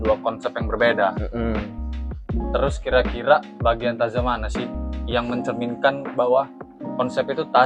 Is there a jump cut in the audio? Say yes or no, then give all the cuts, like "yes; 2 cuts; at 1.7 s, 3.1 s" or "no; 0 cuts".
no; 0 cuts